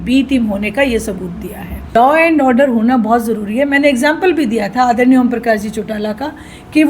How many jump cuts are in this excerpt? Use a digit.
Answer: 1